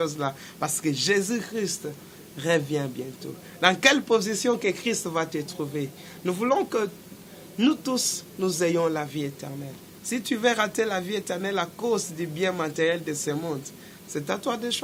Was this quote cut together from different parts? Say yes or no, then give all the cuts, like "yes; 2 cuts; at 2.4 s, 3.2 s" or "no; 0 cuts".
no; 0 cuts